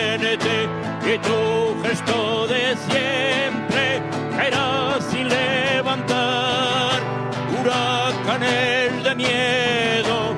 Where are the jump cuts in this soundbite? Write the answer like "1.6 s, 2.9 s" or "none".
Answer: 5.8 s